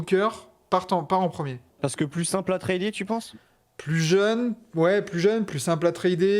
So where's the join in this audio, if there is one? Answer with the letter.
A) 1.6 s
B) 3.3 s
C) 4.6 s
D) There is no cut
A